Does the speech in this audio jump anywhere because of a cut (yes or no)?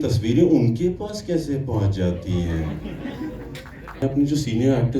yes